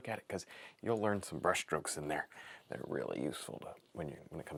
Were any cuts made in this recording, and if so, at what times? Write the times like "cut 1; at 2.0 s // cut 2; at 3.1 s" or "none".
none